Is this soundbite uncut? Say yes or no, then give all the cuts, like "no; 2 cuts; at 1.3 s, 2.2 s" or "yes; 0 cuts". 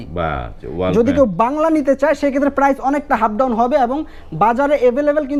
yes; 0 cuts